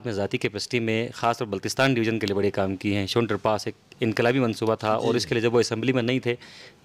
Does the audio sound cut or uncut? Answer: uncut